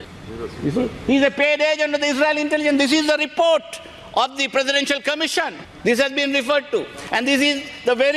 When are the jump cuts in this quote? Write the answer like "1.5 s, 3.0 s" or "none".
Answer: none